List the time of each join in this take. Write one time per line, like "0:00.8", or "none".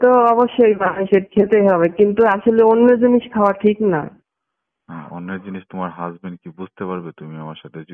none